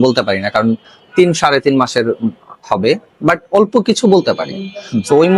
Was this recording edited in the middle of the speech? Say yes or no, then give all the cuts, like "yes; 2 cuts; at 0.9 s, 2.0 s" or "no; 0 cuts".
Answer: no; 0 cuts